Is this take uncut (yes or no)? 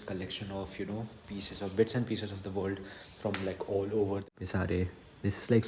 no